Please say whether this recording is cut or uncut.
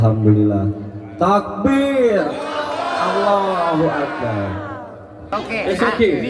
cut